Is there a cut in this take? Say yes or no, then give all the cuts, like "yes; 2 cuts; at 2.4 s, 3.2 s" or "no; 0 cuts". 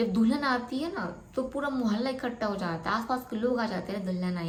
no; 0 cuts